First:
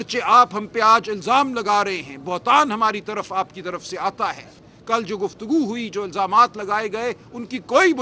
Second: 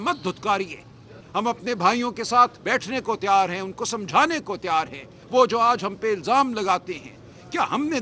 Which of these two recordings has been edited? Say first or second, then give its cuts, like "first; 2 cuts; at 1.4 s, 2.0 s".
first; 1 cut; at 4.5 s